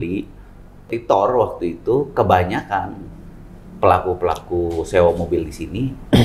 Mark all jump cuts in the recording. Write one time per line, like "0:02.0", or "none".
0:00.9

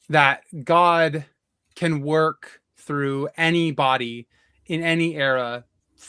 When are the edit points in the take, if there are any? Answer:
none

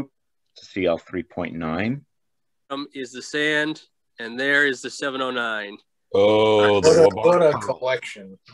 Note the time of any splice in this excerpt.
0:02.7

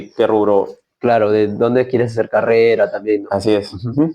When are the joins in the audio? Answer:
none

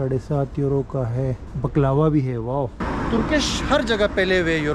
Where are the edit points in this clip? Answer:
0:01.5
0:02.8

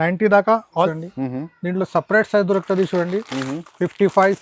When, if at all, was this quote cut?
0:00.9

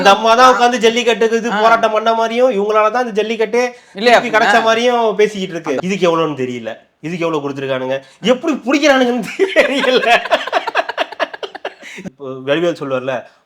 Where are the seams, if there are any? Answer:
0:05.8
0:11.9

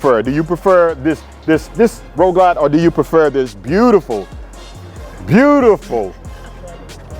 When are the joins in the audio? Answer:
none

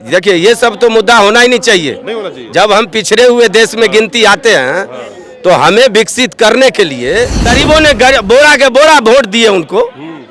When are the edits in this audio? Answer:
0:07.5

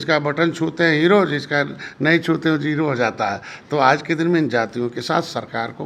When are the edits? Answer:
none

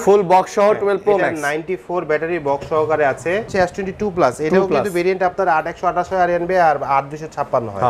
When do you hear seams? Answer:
0:03.5

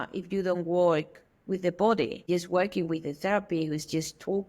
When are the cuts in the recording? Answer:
0:02.2

